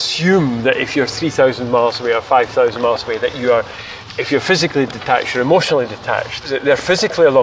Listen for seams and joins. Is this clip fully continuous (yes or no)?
no